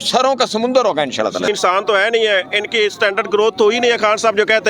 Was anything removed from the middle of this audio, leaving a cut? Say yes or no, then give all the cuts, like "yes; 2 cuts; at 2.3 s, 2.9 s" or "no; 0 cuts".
yes; 1 cut; at 1.5 s